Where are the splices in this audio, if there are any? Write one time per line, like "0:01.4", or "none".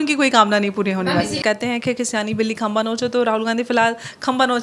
0:01.4